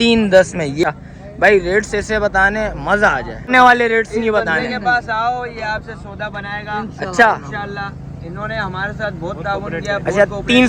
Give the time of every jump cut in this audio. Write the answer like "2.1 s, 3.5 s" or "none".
0.8 s, 3.5 s